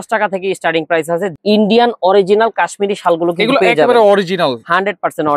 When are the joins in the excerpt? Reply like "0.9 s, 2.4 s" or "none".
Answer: 1.3 s